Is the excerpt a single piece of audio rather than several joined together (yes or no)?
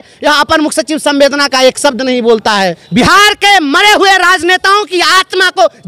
no